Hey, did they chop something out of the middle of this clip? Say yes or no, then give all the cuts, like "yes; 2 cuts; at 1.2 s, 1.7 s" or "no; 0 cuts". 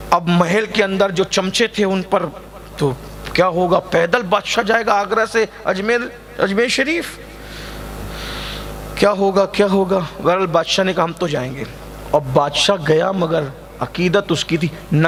no; 0 cuts